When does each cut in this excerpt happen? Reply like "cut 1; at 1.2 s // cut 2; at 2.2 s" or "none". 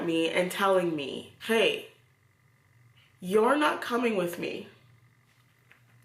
cut 1; at 1.3 s